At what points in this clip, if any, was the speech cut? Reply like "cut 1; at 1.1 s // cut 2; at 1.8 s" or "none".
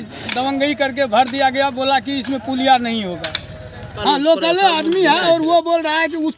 cut 1; at 3.9 s